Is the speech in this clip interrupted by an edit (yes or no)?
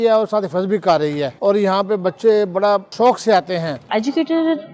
yes